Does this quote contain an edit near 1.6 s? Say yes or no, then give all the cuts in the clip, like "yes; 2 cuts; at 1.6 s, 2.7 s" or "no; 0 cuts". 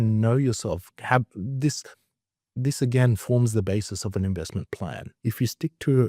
no; 1 cut; at 5.1 s